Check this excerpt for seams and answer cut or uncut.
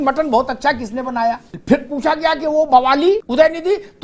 cut